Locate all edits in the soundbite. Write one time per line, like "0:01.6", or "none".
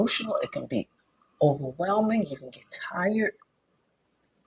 none